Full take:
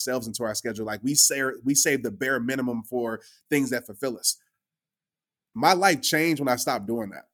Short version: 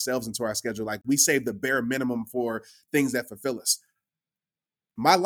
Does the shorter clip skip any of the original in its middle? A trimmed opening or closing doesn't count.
yes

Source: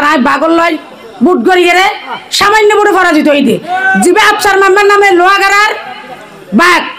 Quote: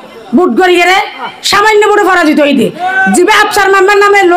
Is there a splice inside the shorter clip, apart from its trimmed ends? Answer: no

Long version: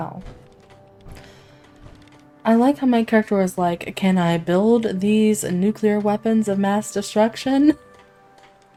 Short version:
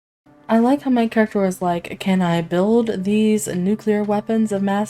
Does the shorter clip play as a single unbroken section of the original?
yes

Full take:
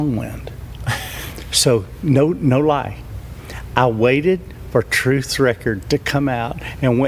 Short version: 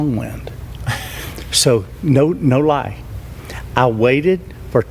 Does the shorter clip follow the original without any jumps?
yes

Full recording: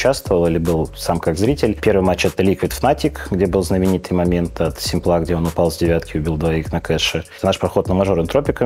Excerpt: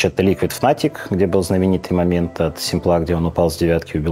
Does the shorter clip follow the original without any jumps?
yes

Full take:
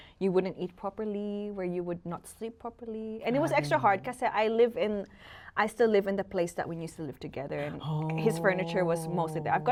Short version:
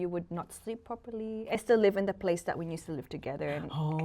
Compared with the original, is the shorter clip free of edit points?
no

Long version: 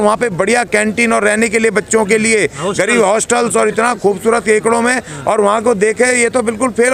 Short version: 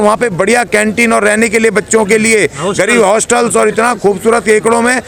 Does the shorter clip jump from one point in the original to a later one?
no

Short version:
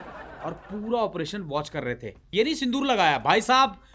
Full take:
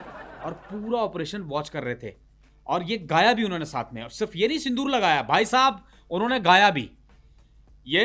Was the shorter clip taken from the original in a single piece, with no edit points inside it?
no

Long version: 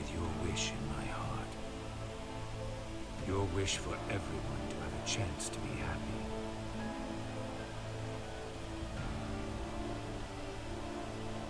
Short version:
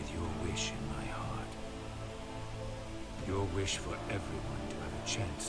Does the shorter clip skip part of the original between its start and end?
no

